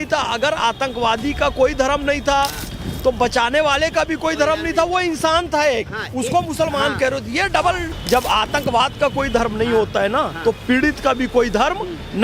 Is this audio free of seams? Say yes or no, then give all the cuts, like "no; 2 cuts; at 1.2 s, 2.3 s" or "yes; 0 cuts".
no; 1 cut; at 7.9 s